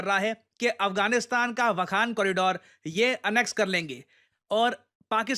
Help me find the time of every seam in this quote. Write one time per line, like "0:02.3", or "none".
0:04.2